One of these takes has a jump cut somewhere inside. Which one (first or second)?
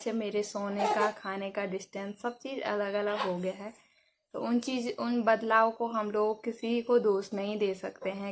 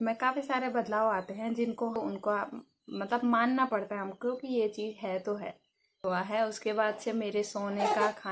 second